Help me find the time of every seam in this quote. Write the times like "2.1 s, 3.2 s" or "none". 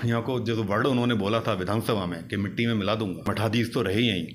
3.3 s